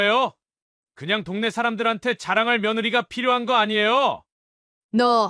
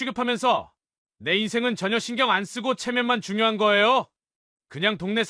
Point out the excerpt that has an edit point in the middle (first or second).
first